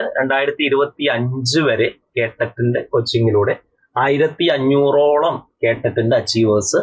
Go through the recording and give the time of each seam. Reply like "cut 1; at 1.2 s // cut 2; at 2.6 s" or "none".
none